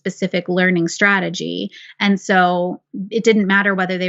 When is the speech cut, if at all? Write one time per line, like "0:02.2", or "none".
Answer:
none